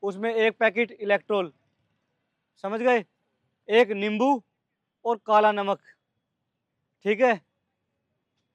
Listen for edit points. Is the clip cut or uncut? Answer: uncut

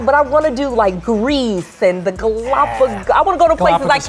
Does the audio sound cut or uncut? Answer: uncut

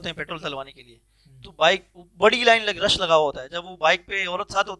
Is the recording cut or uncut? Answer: uncut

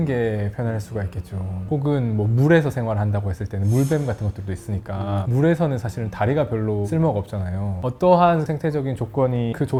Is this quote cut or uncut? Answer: uncut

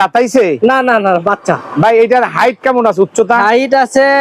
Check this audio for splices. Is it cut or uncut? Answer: uncut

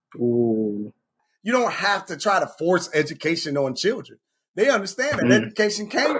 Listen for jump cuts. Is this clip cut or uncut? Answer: cut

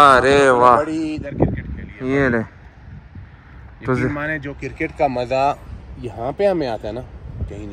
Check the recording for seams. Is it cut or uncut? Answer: uncut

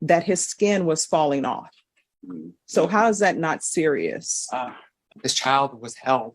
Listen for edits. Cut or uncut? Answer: cut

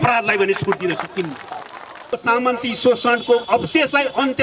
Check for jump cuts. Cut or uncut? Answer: cut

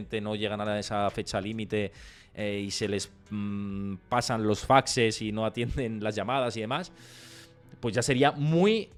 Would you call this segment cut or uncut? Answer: uncut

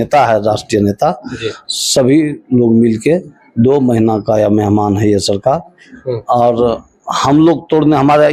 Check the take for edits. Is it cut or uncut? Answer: uncut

